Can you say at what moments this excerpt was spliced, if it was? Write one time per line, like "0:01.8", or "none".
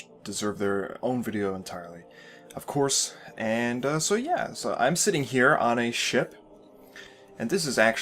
0:02.9

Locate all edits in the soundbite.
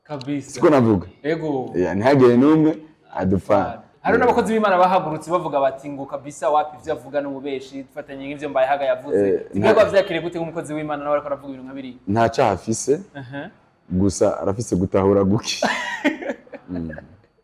0:03.8

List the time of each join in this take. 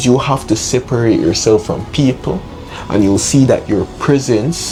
none

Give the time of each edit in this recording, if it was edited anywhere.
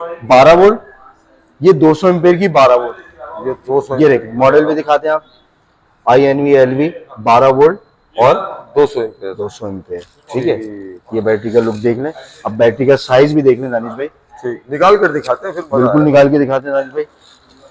none

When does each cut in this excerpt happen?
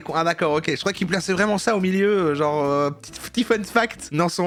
none

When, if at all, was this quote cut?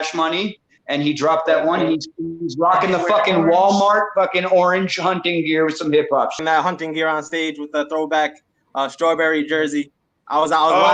0:06.4

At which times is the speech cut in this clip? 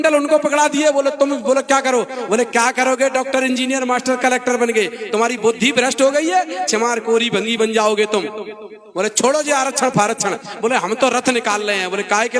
none

